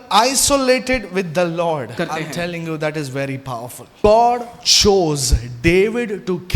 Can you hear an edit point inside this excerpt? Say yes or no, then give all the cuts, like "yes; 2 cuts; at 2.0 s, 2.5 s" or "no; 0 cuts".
yes; 2 cuts; at 1.9 s, 4.0 s